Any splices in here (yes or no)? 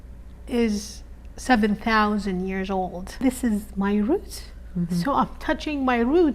yes